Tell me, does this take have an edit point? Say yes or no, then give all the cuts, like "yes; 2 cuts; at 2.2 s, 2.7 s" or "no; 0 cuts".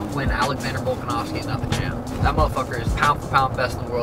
no; 0 cuts